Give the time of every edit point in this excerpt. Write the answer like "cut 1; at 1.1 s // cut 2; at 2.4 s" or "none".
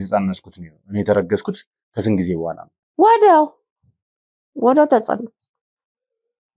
none